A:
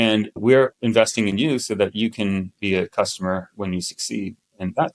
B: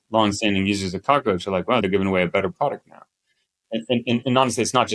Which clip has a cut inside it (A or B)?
B